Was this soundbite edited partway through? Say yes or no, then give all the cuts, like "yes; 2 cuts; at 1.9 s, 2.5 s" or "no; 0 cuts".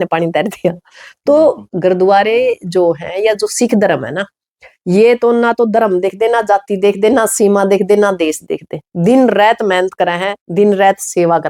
no; 0 cuts